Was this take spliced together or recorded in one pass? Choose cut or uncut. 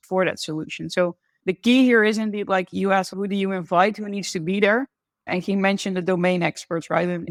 uncut